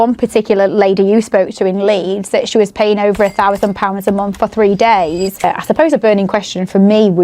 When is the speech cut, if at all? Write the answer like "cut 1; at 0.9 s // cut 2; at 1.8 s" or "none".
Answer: cut 1; at 5.4 s